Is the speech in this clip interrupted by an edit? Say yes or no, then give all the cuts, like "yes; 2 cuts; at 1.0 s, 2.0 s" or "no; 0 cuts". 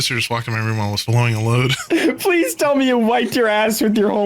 yes; 2 cuts; at 1.0 s, 1.8 s